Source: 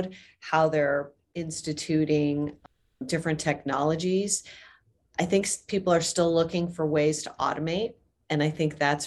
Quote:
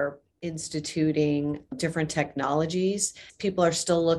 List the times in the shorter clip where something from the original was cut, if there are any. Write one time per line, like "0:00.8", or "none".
0:01.7
0:03.3